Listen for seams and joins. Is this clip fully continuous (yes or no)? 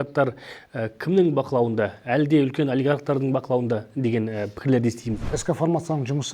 no